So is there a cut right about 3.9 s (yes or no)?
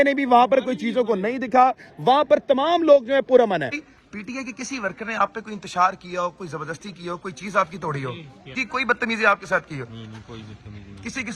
yes